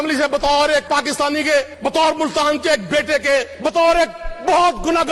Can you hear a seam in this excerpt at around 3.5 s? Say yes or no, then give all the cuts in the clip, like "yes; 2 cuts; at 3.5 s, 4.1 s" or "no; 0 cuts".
yes; 2 cuts; at 1.7 s, 3.5 s